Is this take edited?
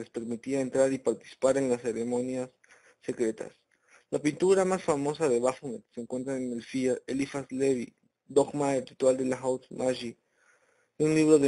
yes; 1 cut; at 7.7 s

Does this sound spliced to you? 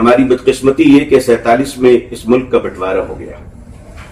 no; 0 cuts

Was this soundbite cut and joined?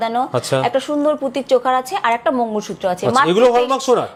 no; 0 cuts

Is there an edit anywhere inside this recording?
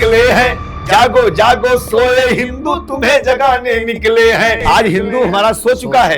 yes; 1 cut; at 4.6 s

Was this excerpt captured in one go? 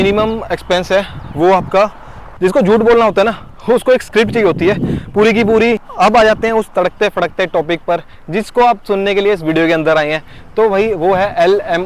no; 2 cuts; at 2.4 s, 5.8 s

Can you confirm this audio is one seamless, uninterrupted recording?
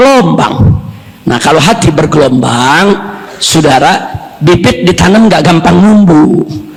yes; 0 cuts

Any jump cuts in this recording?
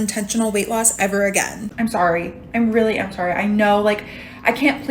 yes; 1 cut; at 1.6 s

